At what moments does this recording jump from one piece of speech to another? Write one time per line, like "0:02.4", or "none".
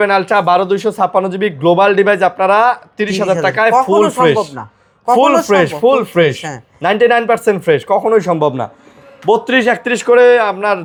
none